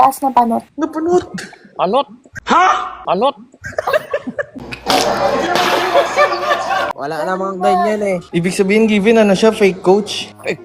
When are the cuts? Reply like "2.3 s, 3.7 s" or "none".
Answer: 7.0 s